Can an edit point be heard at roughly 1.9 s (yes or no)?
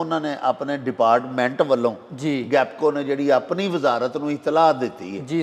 no